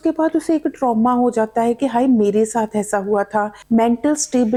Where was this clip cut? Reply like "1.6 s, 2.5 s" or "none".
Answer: none